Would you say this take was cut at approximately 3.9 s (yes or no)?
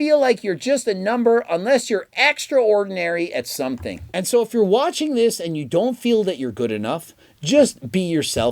yes